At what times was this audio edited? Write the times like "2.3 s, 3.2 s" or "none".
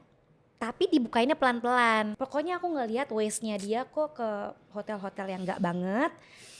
2.1 s